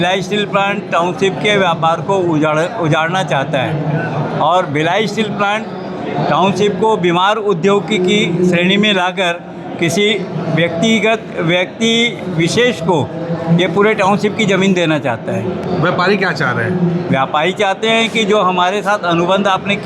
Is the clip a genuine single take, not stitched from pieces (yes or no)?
yes